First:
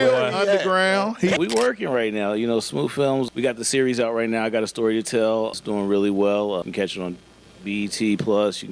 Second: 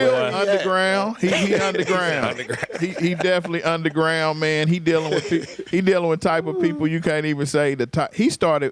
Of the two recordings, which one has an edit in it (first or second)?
first